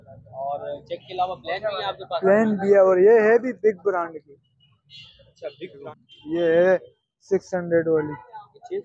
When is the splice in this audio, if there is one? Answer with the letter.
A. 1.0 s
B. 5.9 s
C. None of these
B